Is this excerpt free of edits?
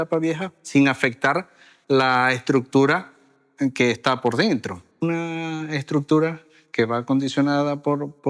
no; 1 cut; at 5.0 s

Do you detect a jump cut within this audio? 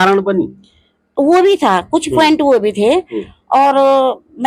no; 0 cuts

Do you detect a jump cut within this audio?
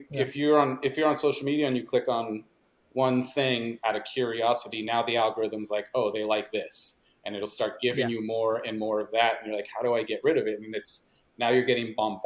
no; 0 cuts

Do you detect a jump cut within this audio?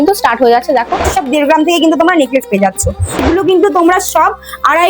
yes; 2 cuts; at 1.1 s, 3.2 s

